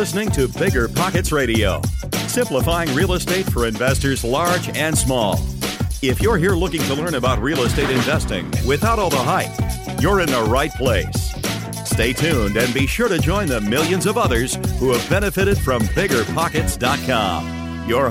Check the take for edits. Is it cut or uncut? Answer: uncut